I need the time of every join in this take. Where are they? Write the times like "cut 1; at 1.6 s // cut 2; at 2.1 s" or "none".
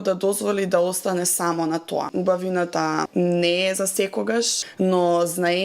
cut 1; at 2.1 s // cut 2; at 3.1 s // cut 3; at 4.6 s